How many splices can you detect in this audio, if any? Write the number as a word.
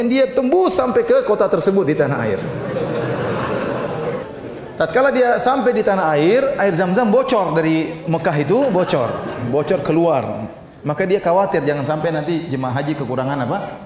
one